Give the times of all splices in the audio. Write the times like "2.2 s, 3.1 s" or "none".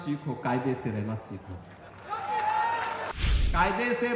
3.2 s

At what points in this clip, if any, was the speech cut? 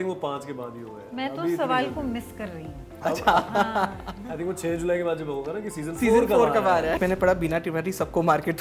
7.0 s

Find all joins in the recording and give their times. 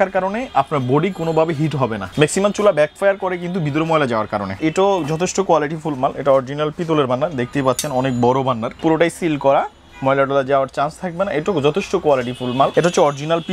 2.0 s, 4.6 s, 8.7 s, 12.7 s

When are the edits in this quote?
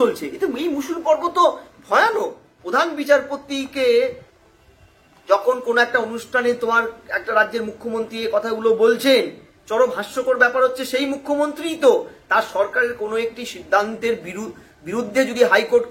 2.5 s

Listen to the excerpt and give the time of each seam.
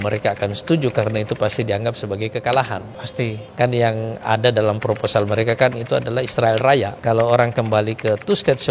3.4 s, 6.9 s

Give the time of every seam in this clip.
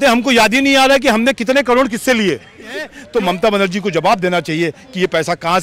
3.0 s

